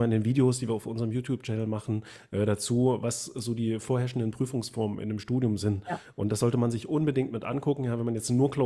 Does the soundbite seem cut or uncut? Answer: uncut